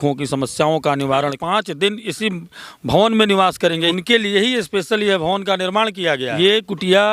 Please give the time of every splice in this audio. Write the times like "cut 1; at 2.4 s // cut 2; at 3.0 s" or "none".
cut 1; at 1.4 s // cut 2; at 3.9 s // cut 3; at 6.3 s